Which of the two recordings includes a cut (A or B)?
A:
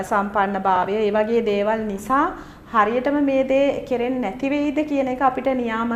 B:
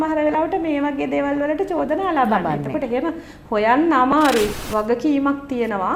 B